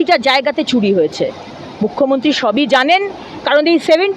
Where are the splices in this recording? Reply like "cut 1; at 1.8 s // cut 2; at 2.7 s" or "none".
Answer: none